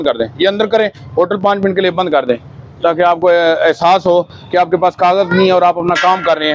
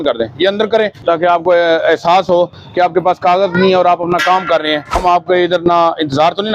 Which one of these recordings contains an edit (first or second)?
second